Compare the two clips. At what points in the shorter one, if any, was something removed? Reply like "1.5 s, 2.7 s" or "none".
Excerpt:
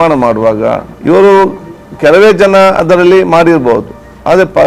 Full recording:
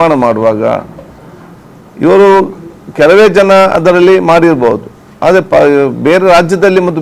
0.9 s